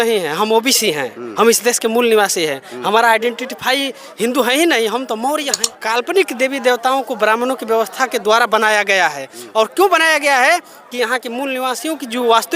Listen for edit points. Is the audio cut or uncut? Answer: cut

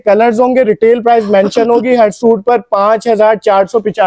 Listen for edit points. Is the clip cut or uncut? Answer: uncut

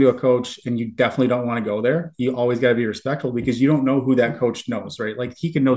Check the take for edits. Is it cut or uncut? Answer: uncut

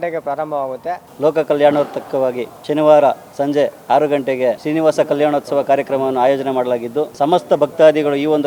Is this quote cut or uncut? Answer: cut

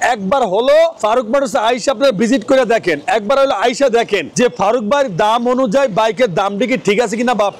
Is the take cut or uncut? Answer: uncut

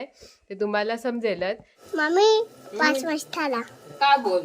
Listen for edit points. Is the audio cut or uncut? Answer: cut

